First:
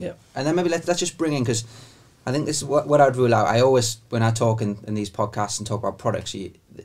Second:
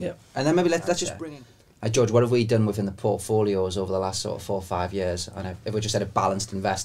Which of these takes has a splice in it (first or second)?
second